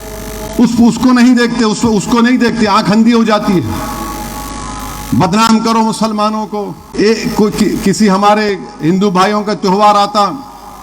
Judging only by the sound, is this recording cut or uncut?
cut